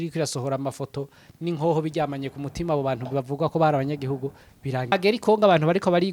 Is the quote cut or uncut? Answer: cut